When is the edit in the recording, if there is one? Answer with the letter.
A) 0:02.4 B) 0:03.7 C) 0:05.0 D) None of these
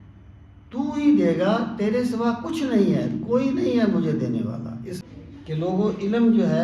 C